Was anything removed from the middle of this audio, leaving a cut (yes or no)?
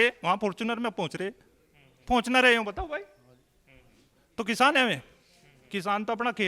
no